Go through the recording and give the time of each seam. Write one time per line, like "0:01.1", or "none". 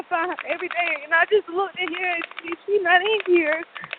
none